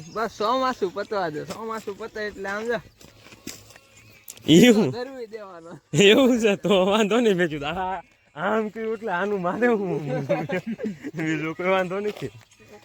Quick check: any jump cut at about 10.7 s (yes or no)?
no